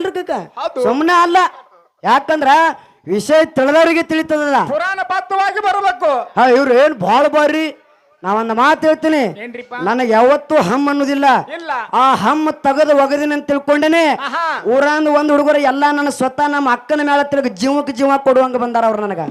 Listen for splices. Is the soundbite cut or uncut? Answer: uncut